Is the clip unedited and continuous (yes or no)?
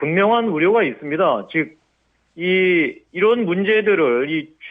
no